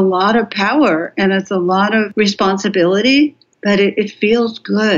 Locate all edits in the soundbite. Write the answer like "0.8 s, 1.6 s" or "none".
2.1 s, 3.5 s